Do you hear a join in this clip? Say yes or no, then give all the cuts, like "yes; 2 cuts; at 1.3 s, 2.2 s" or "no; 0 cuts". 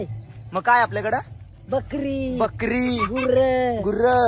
no; 0 cuts